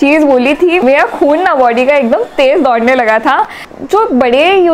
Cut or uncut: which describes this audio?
cut